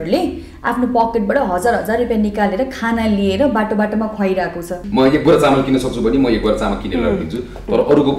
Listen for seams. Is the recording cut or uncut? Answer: cut